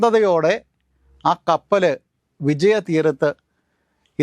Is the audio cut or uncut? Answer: cut